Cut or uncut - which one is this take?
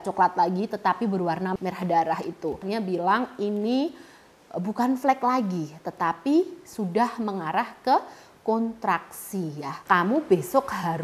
cut